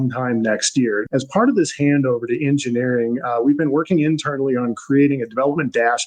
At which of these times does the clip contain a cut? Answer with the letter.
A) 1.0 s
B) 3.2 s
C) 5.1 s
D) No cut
A